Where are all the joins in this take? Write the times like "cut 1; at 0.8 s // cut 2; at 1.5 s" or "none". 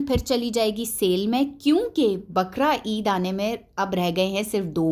none